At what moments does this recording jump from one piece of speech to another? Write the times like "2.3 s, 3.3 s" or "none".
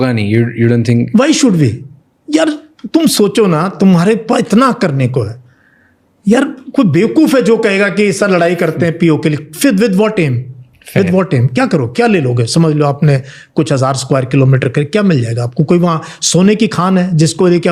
none